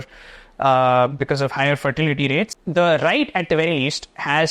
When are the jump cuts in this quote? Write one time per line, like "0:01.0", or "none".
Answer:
0:02.5